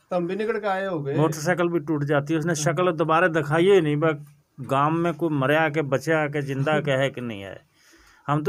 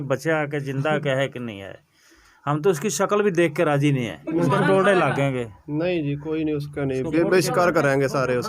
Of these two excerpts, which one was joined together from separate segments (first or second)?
second